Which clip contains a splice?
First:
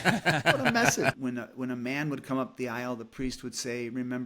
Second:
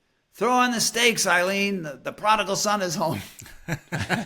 first; 1 cut; at 1.2 s

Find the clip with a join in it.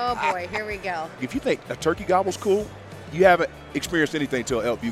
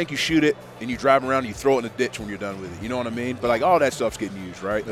first; 1 cut; at 1.2 s

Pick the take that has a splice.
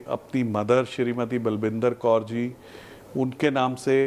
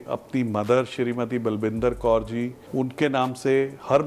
second; 1 cut; at 2.6 s

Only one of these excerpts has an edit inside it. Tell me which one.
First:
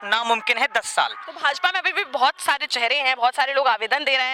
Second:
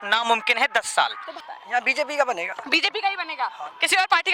second; 1 cut; at 1.3 s

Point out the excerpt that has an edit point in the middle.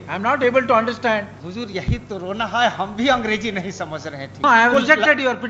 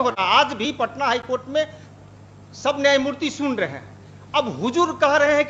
first; 2 cuts; at 1.4 s, 4.4 s

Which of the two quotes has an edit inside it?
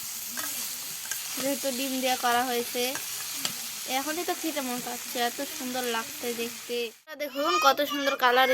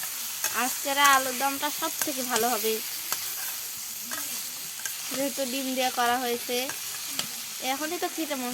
first; 1 cut; at 7.3 s

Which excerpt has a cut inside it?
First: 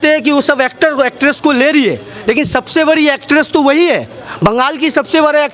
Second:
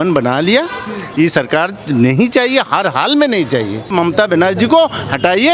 second; 1 cut; at 3.9 s

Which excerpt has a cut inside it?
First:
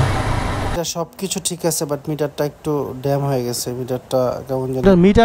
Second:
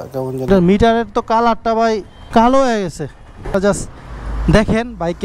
second; 1 cut; at 3.5 s

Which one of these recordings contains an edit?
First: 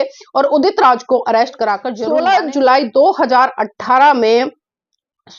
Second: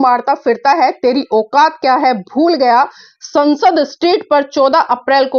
first; 1 cut; at 1.9 s

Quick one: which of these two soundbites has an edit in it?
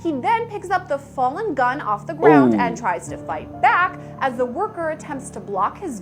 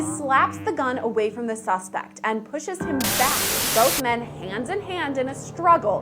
second; 1 cut; at 3.5 s

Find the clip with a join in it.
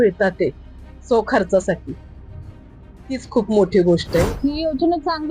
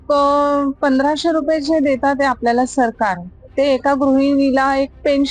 first; 1 cut; at 4.3 s

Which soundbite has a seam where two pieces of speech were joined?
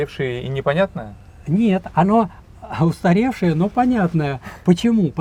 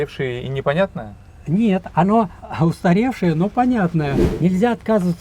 second; 2 cuts; at 2.4 s, 4.2 s

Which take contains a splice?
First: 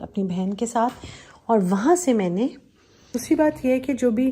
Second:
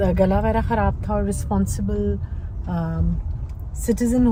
first; 1 cut; at 3.2 s

